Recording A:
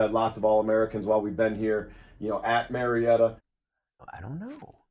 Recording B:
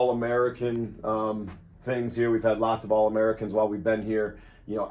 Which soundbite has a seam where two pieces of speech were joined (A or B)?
A